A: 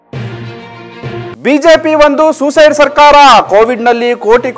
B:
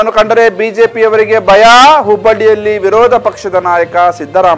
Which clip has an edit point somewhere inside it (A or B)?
A